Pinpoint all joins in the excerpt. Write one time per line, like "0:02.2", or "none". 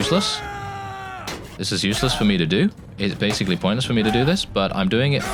none